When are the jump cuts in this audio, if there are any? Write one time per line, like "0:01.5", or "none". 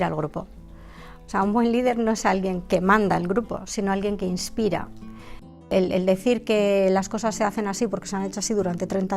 0:05.7